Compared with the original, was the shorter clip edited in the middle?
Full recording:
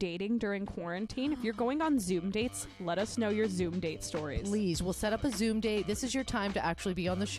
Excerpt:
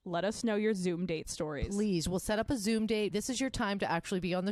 no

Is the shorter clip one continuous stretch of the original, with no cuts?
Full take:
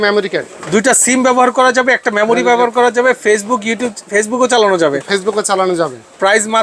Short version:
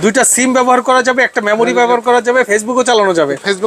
no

